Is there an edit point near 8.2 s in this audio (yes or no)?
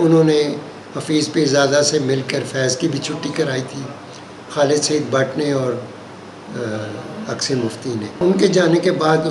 yes